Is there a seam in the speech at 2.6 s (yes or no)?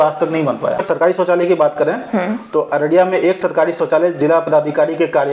no